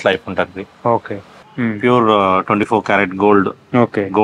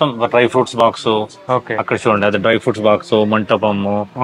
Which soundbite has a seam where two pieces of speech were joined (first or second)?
first